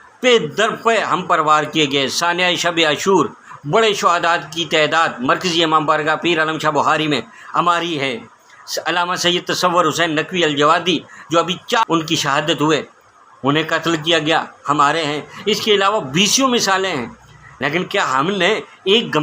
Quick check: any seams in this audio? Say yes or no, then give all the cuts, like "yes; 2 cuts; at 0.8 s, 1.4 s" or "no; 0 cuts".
yes; 1 cut; at 11.8 s